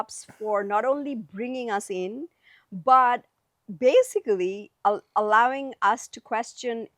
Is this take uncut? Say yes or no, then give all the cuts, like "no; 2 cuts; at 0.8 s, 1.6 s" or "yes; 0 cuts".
yes; 0 cuts